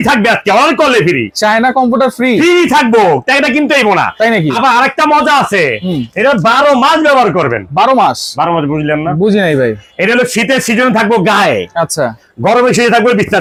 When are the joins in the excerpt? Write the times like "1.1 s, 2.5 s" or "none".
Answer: none